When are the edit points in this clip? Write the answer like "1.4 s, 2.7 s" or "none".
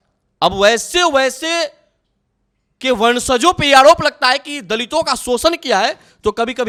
none